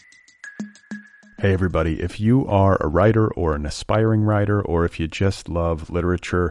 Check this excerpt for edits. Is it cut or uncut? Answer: cut